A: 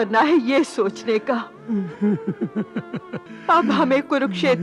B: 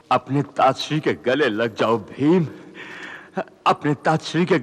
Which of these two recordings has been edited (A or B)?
A